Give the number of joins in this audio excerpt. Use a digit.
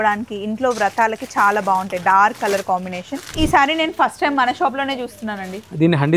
1